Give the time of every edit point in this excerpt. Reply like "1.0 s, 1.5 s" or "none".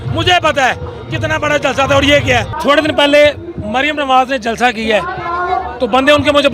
2.6 s